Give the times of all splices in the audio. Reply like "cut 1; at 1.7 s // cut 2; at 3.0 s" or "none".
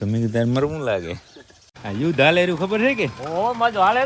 cut 1; at 1.4 s